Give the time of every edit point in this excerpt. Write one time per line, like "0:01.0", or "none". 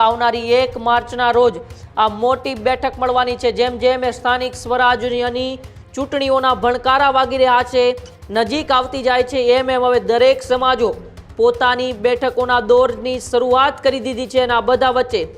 none